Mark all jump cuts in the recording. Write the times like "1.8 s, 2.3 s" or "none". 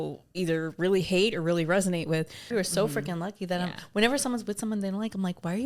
2.4 s